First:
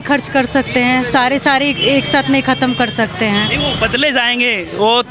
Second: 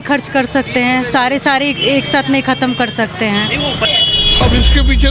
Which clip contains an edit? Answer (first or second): second